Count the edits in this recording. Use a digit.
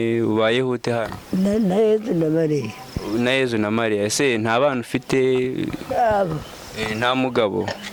0